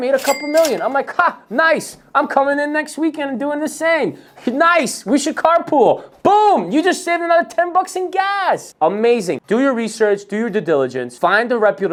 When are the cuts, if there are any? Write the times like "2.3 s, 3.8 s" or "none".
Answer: none